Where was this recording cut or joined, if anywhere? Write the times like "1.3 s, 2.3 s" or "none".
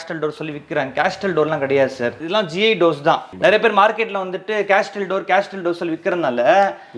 2.1 s, 3.3 s